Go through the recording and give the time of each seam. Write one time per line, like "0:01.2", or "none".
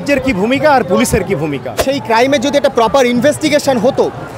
0:01.7

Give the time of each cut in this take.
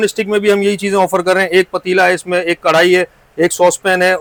none

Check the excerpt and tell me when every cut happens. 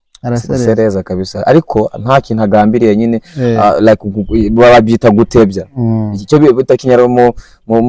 none

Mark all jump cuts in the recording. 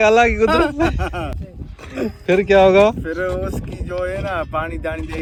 none

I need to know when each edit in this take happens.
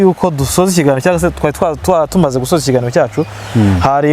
none

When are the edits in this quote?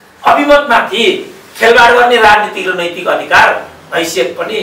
none

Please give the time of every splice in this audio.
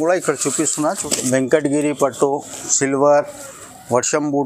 0:01.0

